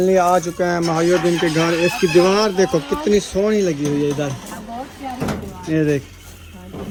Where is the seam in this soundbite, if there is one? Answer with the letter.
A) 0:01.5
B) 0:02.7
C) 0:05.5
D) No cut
D